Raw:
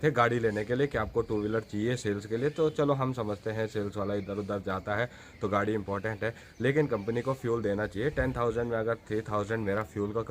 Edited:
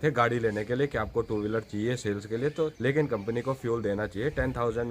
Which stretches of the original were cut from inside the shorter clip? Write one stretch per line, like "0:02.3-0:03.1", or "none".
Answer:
0:02.7-0:06.5